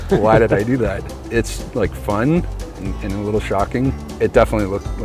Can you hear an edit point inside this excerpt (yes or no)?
yes